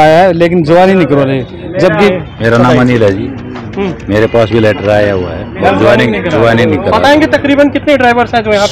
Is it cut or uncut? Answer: cut